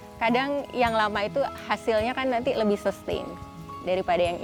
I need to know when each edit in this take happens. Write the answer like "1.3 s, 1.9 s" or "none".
none